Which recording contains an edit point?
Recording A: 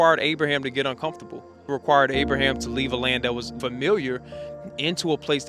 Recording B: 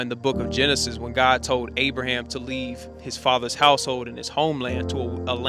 A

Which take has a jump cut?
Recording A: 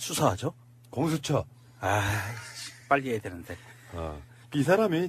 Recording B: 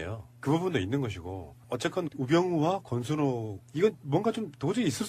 A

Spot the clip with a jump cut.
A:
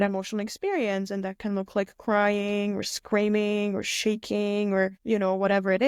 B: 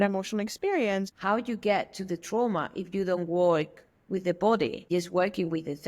B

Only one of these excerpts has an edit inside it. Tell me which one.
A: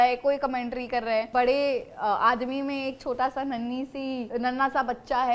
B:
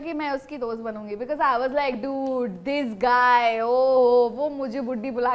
A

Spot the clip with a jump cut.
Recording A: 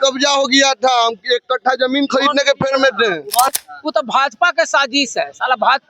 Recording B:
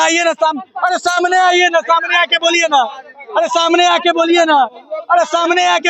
A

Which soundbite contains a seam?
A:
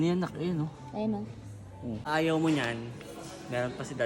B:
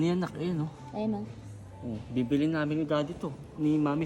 A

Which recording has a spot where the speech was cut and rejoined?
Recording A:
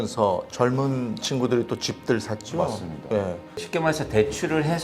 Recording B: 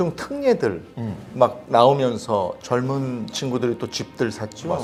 A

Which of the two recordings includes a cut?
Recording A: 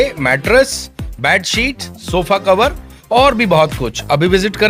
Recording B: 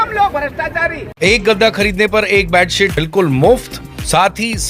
B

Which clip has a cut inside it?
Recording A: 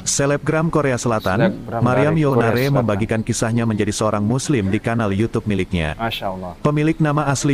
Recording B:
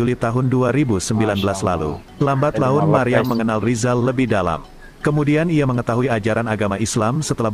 B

